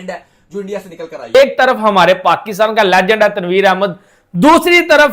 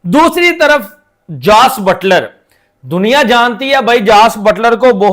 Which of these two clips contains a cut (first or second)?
first